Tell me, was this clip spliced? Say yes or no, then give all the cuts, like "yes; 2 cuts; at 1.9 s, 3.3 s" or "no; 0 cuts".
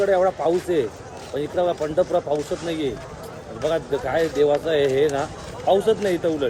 no; 0 cuts